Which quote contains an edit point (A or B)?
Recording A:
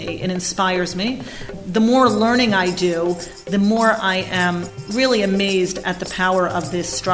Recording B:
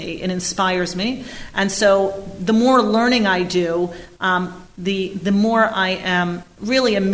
A